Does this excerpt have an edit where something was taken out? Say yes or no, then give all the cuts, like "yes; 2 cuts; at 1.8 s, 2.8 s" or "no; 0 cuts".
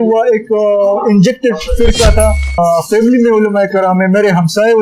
yes; 1 cut; at 2.6 s